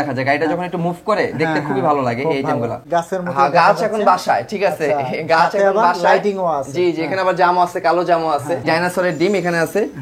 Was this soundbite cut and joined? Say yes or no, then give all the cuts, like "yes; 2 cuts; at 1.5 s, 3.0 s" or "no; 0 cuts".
yes; 2 cuts; at 2.8 s, 8.7 s